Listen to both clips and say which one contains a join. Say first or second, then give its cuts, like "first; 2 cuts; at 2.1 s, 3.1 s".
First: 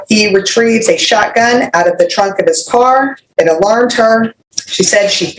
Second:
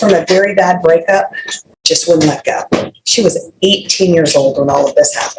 first; 2 cuts; at 3.2 s, 4.4 s